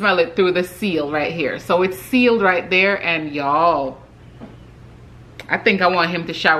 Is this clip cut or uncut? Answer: uncut